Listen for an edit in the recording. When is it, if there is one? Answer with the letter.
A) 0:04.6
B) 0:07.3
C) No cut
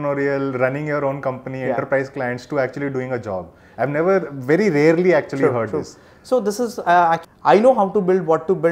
B